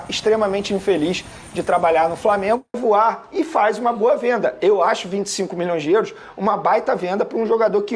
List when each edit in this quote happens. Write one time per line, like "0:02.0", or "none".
0:02.8